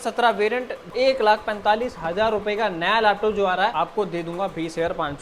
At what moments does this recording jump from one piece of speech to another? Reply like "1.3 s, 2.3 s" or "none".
0.9 s, 3.7 s